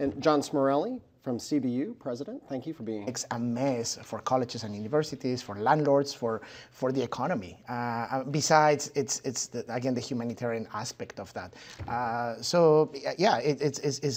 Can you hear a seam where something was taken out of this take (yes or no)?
no